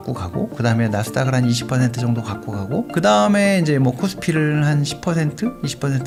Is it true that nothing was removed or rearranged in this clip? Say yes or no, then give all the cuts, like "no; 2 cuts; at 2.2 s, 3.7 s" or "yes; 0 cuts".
yes; 0 cuts